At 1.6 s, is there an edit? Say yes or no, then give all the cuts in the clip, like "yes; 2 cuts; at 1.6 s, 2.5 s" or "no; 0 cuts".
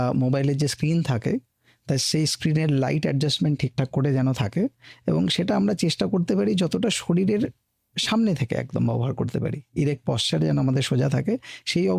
no; 0 cuts